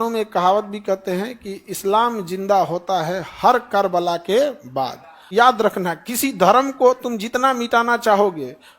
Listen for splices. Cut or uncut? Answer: cut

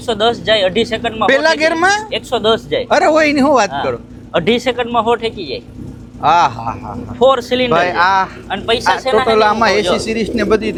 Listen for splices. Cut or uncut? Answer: uncut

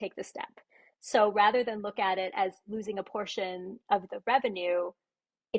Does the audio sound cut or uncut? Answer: uncut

